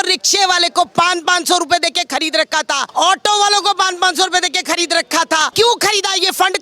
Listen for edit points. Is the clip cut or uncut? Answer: cut